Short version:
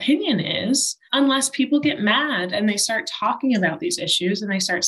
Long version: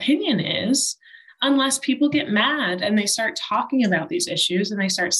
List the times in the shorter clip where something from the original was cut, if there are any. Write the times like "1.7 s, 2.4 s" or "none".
1.0 s